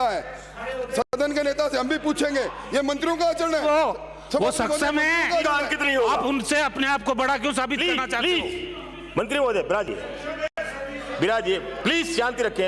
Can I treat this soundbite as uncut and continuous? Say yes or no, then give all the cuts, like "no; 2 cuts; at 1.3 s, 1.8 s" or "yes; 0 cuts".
yes; 0 cuts